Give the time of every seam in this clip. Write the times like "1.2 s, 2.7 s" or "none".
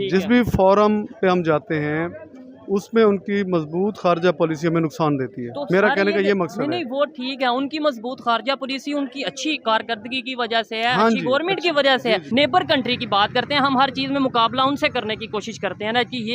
12.2 s